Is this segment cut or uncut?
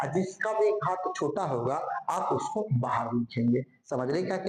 uncut